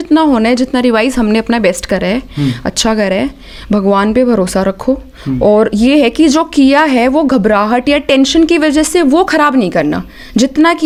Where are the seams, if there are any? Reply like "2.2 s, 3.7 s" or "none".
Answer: none